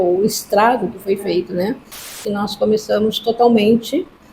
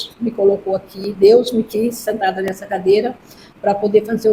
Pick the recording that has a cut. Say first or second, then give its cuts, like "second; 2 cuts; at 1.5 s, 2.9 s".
first; 1 cut; at 2.2 s